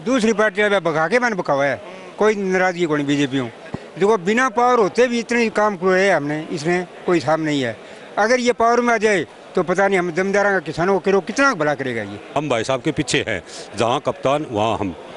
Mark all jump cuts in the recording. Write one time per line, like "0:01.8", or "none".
0:03.6
0:12.2